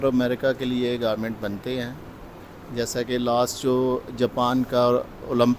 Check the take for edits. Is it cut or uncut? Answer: uncut